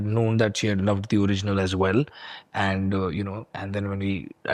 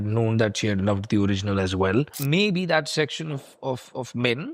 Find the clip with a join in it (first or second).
second